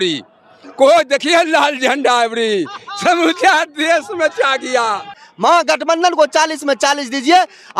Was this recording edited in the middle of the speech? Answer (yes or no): yes